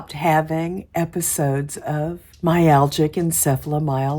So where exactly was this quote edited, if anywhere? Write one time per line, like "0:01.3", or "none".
0:02.3